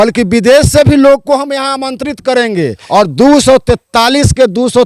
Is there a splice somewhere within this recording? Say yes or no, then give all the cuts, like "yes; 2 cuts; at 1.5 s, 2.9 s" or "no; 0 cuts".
yes; 1 cut; at 2.8 s